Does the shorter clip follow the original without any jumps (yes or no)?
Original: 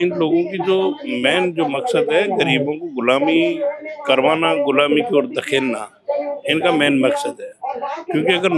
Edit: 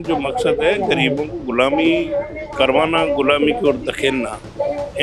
yes